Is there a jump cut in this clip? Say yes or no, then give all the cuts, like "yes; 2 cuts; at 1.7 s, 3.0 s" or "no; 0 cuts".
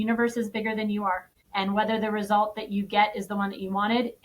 yes; 1 cut; at 1.3 s